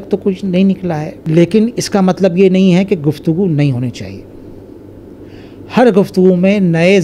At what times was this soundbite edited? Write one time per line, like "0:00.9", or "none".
0:01.1

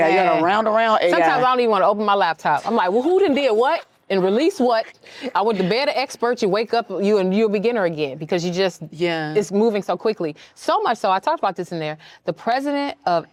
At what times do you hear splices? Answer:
none

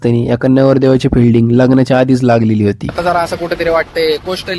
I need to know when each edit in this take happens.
0:02.9

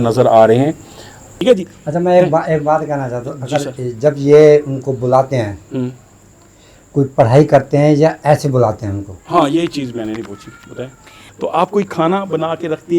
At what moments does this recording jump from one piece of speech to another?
0:01.3
0:11.2

